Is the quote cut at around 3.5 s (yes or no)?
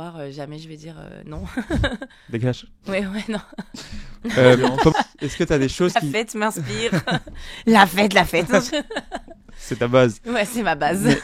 no